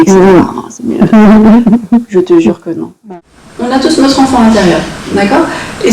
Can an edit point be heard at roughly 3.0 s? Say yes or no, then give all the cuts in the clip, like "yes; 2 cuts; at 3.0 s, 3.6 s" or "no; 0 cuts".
yes; 1 cut; at 3.0 s